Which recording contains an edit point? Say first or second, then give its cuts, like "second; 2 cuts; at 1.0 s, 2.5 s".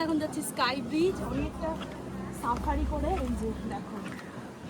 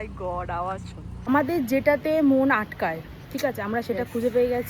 second; 1 cut; at 1.1 s